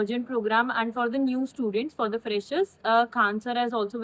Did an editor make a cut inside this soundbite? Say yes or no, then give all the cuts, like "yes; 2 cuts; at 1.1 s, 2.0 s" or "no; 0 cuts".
no; 0 cuts